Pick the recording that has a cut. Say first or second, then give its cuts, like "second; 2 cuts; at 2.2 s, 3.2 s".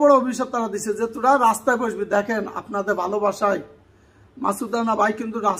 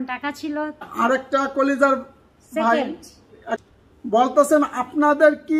second; 2 cuts; at 0.9 s, 3.6 s